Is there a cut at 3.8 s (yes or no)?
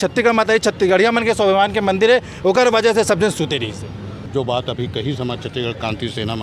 no